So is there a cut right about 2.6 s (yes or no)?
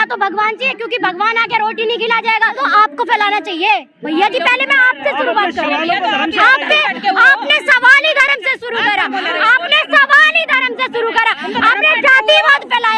yes